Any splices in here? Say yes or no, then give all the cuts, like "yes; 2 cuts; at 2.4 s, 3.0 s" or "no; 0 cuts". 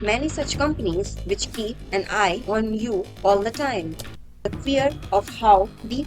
yes; 1 cut; at 4.4 s